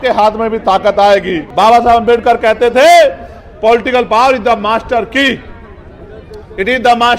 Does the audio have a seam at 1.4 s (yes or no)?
yes